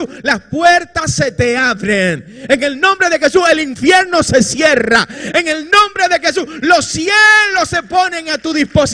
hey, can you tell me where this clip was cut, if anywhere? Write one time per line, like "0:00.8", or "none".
none